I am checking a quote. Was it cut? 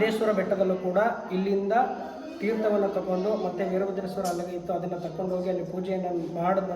no; 0 cuts

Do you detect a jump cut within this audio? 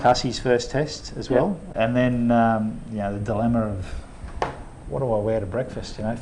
yes; 1 cut; at 1.6 s

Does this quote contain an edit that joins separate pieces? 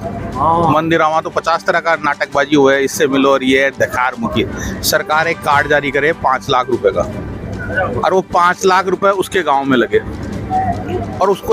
no; 0 cuts

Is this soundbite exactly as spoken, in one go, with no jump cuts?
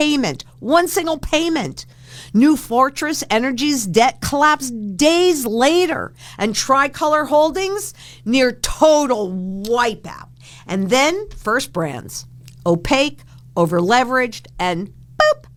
yes; 0 cuts

